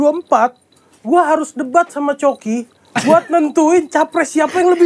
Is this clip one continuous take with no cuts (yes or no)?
yes